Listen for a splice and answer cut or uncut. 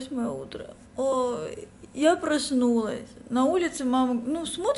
uncut